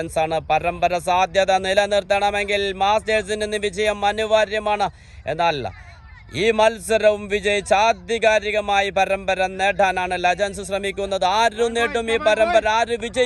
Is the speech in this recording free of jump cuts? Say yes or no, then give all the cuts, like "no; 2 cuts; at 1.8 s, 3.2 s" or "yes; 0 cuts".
yes; 0 cuts